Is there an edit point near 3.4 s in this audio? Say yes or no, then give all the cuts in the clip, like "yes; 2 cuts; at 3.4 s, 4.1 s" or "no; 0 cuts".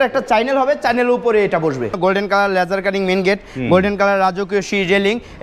no; 1 cut; at 2.0 s